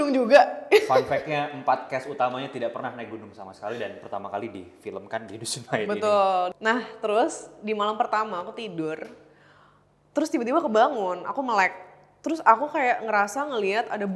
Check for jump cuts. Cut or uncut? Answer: cut